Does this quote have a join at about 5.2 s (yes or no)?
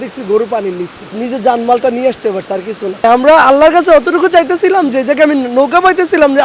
no